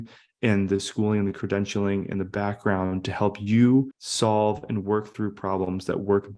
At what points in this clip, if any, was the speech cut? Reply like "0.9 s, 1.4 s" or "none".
4.0 s

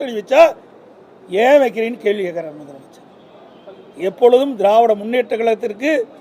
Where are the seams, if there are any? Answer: none

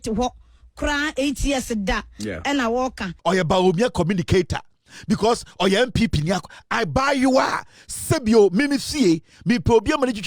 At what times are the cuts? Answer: 3.1 s

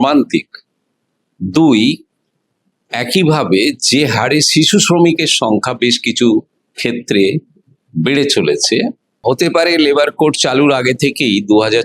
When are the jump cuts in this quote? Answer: 9.2 s

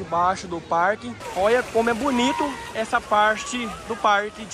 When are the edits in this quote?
1.2 s

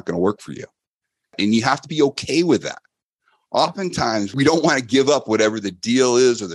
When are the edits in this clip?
1.3 s, 4.3 s

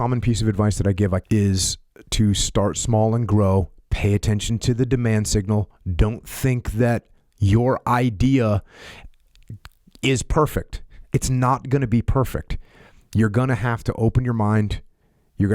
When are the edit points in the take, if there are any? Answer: 1.2 s

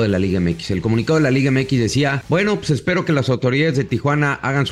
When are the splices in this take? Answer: 2.2 s

